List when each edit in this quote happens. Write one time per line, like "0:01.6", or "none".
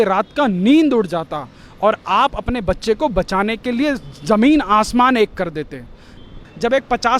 0:06.3